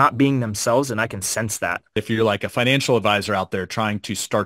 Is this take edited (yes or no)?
yes